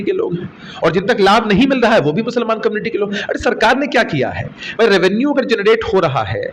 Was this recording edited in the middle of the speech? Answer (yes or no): no